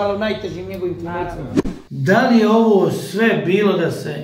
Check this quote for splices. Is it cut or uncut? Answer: cut